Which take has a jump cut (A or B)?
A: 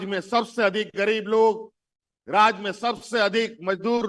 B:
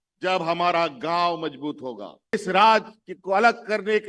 B